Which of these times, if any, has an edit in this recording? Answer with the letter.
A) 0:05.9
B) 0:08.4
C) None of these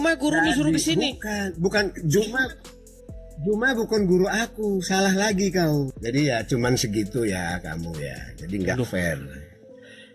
A